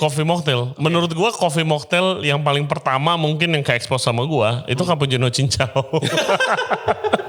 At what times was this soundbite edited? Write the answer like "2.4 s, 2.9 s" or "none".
none